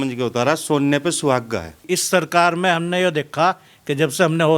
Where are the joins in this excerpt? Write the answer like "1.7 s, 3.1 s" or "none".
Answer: 1.8 s